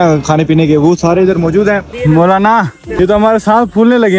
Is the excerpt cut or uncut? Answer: cut